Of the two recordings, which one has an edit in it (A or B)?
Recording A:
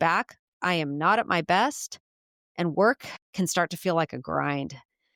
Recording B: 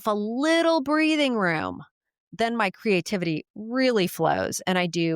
B